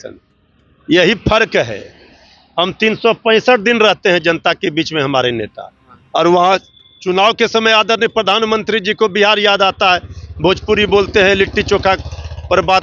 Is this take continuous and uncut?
yes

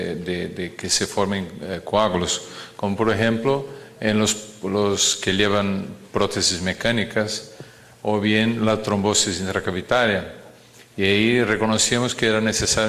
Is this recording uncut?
yes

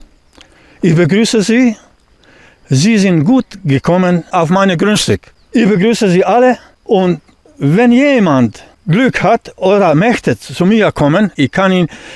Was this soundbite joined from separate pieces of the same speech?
yes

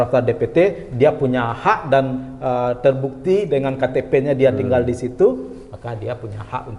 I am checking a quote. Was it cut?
no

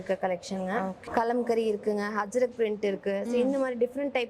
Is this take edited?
yes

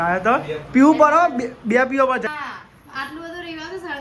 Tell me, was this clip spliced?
yes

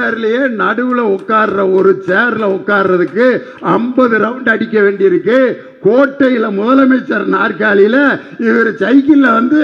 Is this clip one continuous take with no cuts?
yes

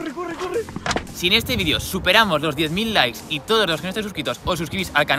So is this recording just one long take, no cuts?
no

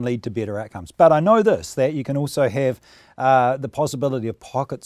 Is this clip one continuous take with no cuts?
yes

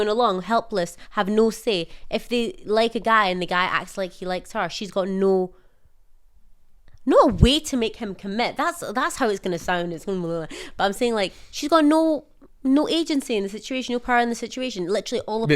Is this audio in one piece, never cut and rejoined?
yes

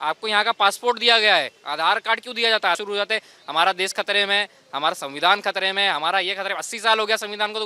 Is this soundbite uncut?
no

